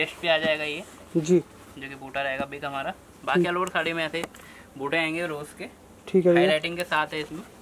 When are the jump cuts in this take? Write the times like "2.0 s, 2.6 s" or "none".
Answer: none